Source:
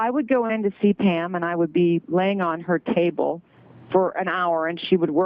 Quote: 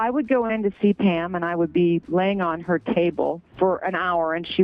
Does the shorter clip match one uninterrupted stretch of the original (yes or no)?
no